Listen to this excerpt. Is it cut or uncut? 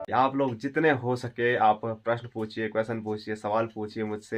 uncut